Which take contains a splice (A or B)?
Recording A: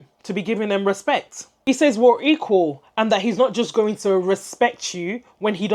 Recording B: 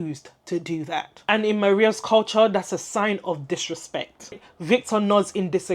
B